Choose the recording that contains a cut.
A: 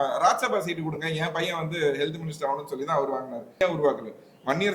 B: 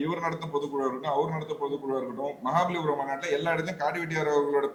A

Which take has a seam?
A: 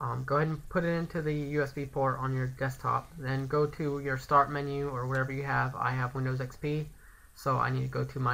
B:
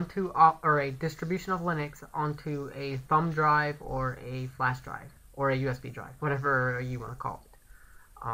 A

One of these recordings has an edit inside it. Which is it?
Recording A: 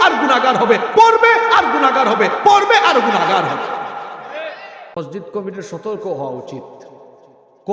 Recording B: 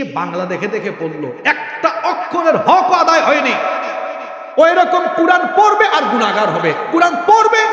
A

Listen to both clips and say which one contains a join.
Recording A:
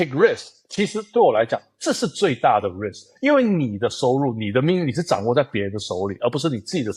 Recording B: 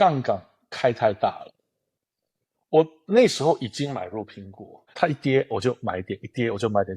B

